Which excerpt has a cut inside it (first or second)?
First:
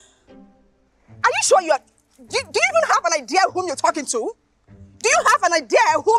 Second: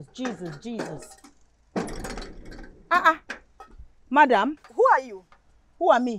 second